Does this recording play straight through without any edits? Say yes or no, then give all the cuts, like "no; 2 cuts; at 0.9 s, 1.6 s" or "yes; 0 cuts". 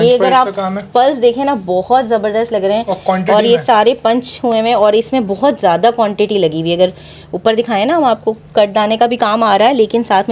yes; 0 cuts